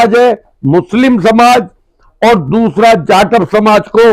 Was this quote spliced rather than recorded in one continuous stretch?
no; 0 cuts

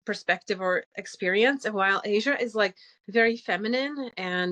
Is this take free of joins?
yes; 0 cuts

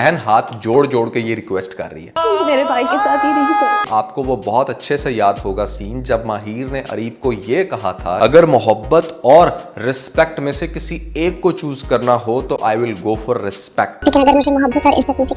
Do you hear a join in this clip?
yes; 2 cuts; at 3.8 s, 8.2 s

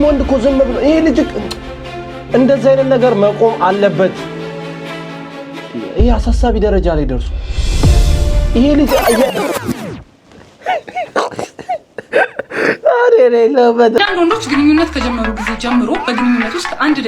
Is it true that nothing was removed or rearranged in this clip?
no; 1 cut; at 14.0 s

